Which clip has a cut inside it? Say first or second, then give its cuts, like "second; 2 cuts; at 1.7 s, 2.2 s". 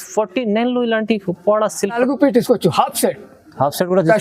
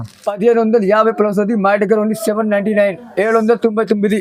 first; 1 cut; at 2.0 s